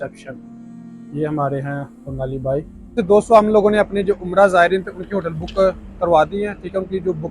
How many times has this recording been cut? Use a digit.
1